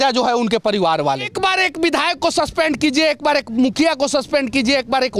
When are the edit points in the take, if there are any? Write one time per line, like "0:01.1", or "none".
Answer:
0:01.3

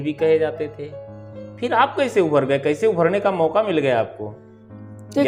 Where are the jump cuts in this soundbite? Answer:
none

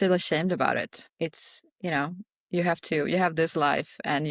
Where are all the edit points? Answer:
0:01.0

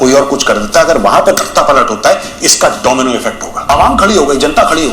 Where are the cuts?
0:03.7

